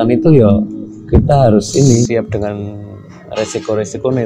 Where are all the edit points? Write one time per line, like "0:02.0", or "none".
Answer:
0:02.1